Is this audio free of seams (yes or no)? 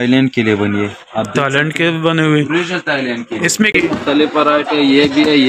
no